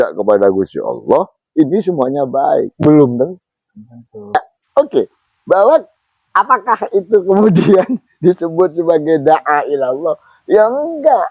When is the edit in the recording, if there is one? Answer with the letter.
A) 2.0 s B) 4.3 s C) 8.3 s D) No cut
B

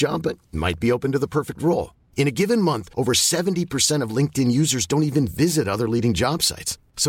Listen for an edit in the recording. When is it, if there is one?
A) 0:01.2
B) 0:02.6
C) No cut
C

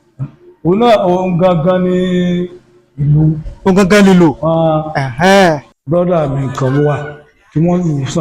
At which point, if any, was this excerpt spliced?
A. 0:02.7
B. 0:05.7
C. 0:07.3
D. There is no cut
B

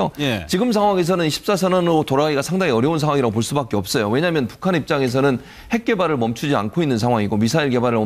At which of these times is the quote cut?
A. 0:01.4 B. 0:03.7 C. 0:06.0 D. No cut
B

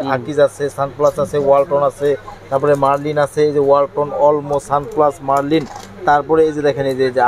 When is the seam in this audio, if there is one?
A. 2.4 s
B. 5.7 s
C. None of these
C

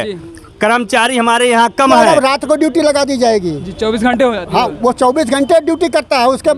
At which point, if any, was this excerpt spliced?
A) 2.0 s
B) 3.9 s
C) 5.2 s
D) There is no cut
A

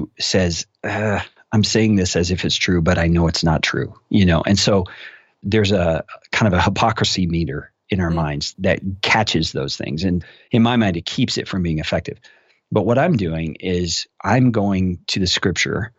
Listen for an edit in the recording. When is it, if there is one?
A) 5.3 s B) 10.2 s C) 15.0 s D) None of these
B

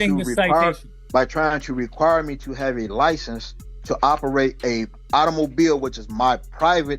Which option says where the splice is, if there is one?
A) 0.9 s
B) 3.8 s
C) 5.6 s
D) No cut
A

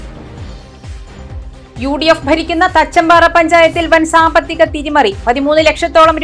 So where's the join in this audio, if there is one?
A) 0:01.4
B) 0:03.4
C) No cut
A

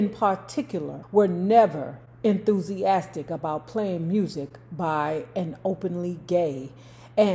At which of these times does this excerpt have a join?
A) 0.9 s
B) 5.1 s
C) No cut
A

